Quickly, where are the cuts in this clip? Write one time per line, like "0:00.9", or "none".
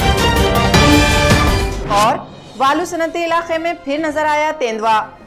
none